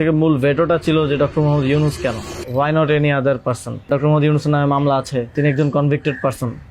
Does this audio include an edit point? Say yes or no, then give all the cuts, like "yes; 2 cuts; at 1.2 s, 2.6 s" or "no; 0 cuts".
yes; 3 cuts; at 2.3 s, 3.9 s, 5.3 s